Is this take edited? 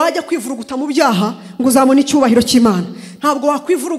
no; 0 cuts

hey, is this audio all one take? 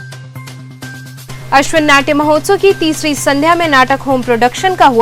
yes; 0 cuts

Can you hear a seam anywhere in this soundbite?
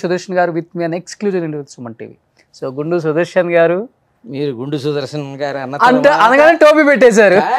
no; 0 cuts

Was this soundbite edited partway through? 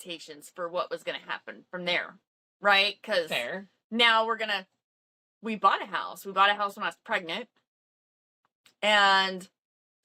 no; 0 cuts

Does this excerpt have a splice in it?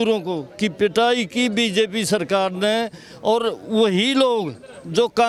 no; 0 cuts

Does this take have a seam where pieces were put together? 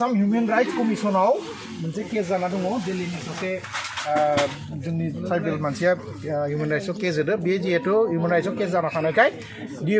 no; 0 cuts

